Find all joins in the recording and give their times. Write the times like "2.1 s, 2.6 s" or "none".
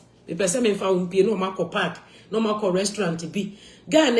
none